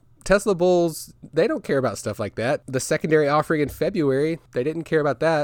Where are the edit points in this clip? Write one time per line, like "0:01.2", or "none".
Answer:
0:02.6
0:04.4

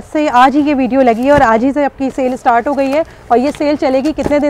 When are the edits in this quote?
none

